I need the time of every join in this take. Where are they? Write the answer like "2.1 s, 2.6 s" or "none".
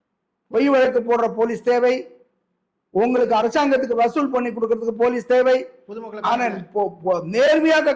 none